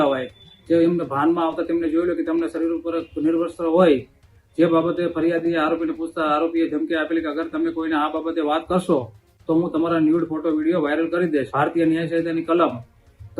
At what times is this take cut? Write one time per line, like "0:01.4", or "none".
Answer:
0:11.5